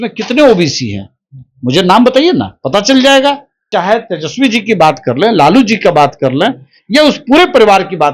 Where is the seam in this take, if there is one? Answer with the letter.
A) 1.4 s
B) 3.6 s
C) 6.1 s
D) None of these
B